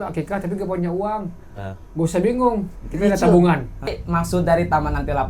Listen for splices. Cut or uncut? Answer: cut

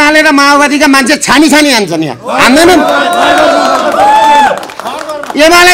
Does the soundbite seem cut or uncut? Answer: uncut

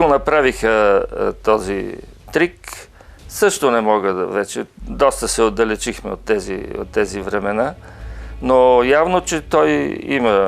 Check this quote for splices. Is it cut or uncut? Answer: uncut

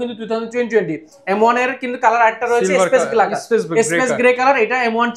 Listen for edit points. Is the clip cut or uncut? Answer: uncut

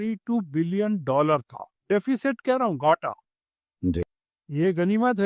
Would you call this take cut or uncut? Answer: cut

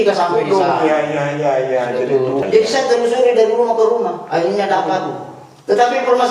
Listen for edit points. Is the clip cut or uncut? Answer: cut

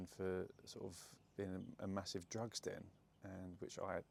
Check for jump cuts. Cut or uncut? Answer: uncut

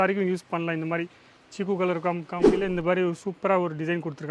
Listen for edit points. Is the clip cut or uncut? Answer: cut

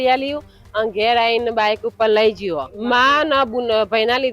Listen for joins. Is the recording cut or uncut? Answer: cut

